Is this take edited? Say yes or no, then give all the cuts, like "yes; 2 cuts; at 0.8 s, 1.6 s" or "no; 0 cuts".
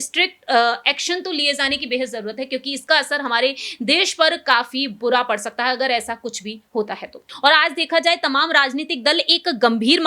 yes; 1 cut; at 7.2 s